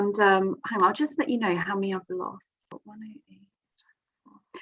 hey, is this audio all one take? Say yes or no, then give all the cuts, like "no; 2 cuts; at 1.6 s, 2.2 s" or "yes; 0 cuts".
no; 1 cut; at 2.8 s